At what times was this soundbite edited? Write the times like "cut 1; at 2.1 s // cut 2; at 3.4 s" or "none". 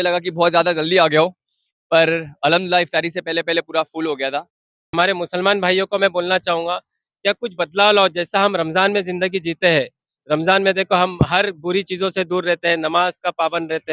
cut 1; at 4.9 s